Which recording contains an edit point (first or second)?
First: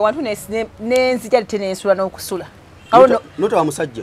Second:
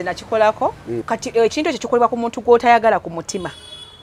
second